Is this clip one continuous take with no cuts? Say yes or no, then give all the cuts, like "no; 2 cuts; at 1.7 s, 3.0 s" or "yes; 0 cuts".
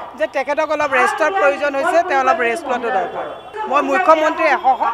yes; 0 cuts